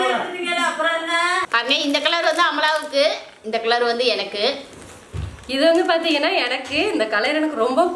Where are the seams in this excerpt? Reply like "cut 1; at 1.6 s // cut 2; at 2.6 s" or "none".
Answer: cut 1; at 1.4 s